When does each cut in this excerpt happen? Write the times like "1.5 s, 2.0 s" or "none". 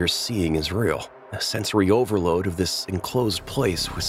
none